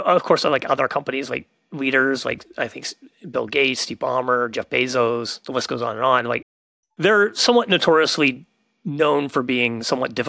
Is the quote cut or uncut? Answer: uncut